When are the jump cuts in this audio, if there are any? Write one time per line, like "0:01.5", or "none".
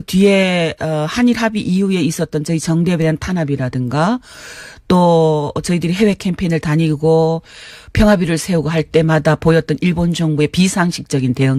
none